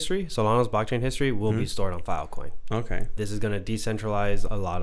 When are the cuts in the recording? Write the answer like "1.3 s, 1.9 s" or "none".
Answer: 3.1 s